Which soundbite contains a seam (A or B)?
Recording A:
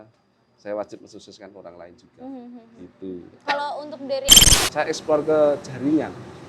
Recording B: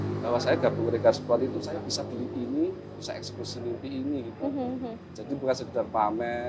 A